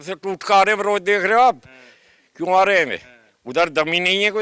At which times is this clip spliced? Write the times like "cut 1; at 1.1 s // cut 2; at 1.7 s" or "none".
none